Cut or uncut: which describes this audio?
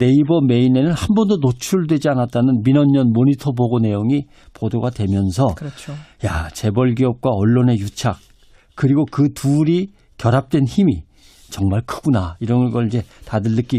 cut